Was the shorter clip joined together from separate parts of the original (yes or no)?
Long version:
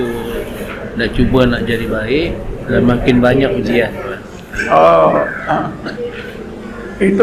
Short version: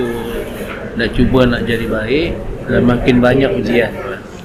no